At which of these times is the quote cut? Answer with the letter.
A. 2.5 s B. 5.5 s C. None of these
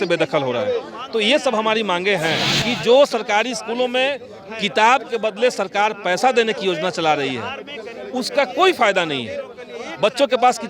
A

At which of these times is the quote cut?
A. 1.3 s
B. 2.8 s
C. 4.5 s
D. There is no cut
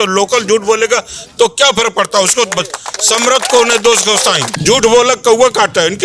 C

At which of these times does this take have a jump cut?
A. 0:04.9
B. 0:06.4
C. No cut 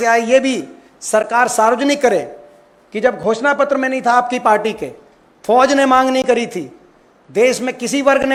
C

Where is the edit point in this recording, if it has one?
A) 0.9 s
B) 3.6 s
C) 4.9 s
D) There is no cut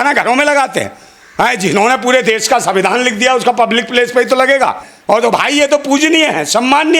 C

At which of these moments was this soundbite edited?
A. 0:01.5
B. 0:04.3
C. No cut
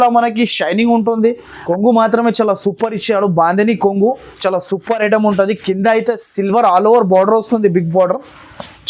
A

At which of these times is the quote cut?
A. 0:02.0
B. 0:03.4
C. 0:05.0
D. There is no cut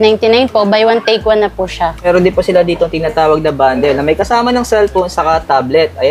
A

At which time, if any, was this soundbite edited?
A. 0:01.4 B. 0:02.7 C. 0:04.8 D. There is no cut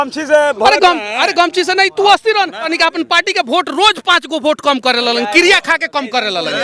B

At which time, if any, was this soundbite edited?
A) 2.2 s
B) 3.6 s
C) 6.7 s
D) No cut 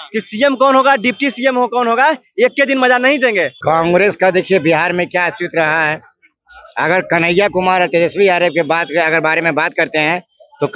B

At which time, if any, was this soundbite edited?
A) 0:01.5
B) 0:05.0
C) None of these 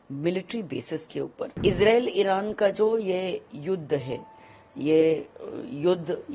A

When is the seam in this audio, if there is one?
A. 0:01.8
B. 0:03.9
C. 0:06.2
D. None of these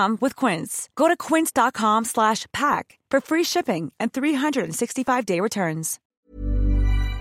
C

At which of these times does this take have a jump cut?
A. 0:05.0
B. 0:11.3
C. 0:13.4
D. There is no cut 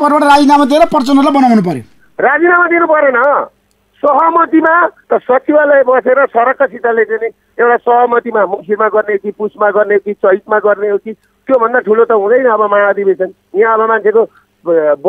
A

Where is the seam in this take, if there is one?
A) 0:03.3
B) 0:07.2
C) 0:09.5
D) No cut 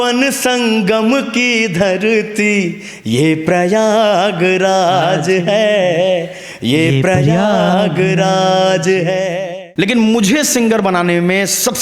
C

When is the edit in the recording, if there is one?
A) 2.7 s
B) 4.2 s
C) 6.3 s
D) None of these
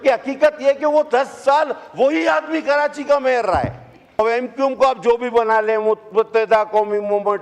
B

